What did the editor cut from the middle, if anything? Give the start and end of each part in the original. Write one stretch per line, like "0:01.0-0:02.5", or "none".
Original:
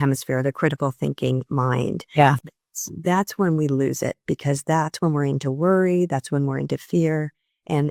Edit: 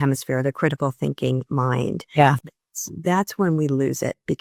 none

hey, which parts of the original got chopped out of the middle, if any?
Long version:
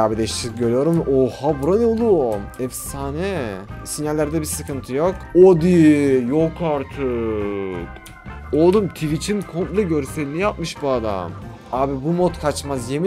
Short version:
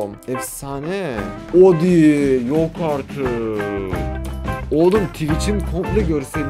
0:03.7-0:05.2

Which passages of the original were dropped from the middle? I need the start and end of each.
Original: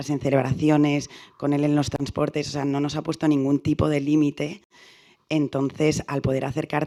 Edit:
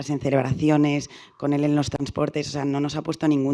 none

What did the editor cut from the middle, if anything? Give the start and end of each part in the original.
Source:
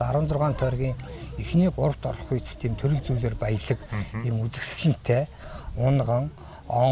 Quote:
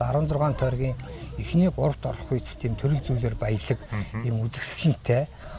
none

